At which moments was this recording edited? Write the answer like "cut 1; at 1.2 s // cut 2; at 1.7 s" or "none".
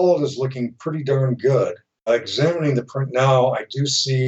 cut 1; at 2.1 s